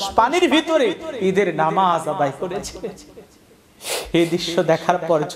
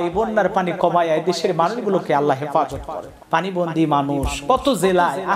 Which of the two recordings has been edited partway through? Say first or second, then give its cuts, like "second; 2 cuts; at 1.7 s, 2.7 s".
second; 1 cut; at 3.1 s